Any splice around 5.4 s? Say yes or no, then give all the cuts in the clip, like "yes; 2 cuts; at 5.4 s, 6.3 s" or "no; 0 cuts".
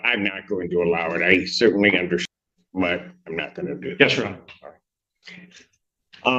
no; 1 cut; at 2.2 s